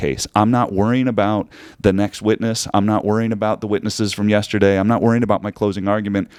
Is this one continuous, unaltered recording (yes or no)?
yes